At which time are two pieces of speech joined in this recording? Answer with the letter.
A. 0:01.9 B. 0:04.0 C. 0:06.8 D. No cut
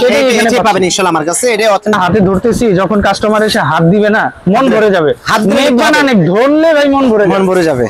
A